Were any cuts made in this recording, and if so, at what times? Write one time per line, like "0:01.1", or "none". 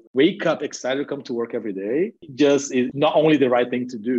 0:02.2